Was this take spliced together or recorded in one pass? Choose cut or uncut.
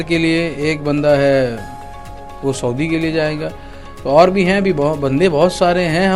uncut